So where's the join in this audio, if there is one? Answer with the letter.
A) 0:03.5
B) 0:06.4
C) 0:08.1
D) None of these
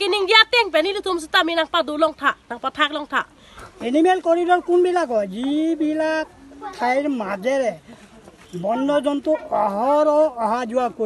A